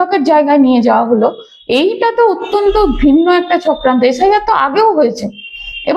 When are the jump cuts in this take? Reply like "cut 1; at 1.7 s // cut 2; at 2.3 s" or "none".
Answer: none